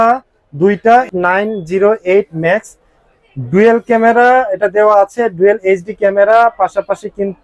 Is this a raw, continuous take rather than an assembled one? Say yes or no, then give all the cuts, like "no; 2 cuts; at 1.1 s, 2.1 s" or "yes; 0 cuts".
no; 1 cut; at 1.1 s